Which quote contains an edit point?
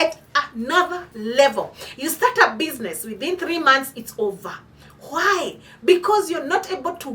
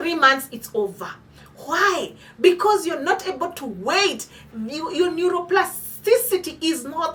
first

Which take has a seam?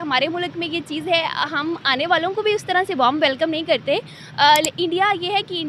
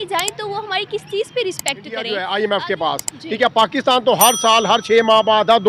second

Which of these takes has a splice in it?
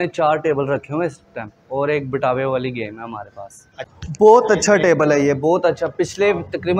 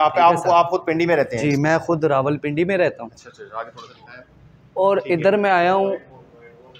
first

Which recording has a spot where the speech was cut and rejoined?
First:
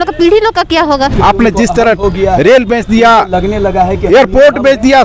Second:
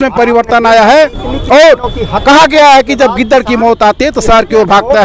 first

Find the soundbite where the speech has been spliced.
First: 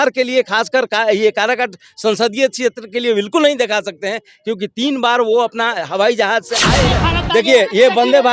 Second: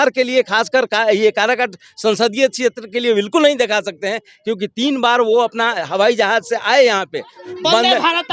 first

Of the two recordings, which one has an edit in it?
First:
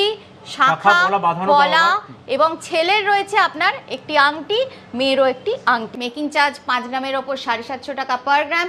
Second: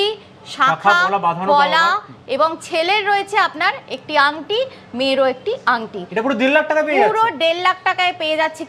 first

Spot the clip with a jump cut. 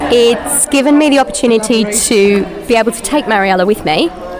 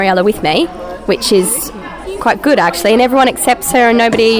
second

